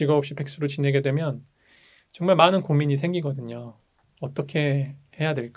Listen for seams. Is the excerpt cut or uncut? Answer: cut